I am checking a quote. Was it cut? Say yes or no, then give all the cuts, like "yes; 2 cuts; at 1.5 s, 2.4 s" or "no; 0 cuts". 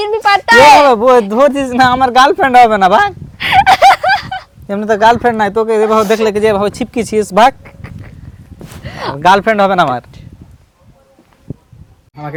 no; 0 cuts